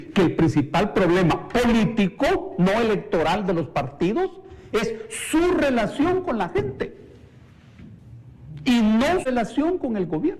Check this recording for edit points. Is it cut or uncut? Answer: cut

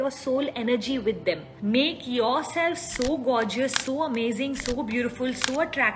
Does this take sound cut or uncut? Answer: cut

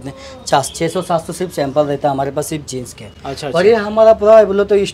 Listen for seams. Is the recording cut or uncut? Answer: uncut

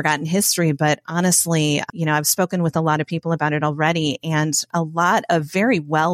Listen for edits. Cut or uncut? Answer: cut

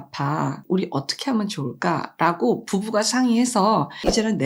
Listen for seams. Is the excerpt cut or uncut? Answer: uncut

